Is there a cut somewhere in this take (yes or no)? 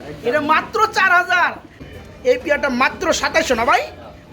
yes